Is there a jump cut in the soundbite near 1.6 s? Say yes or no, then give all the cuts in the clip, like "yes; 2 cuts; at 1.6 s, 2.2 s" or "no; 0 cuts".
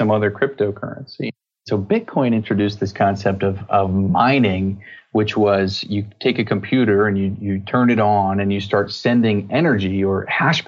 yes; 1 cut; at 1.6 s